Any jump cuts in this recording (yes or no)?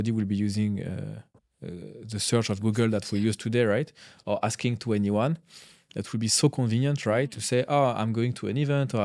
no